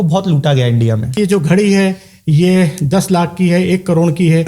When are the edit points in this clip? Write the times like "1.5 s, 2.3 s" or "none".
1.1 s